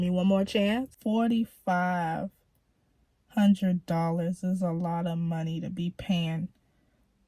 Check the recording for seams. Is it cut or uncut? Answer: cut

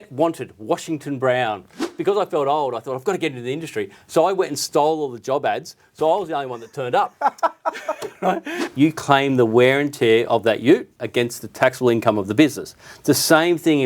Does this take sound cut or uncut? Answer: cut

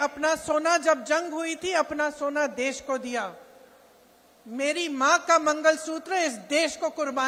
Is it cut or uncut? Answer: uncut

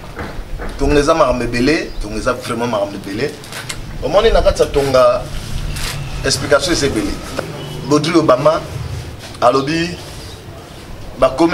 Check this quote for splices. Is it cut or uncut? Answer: cut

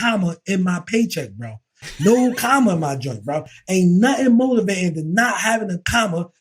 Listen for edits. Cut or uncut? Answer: uncut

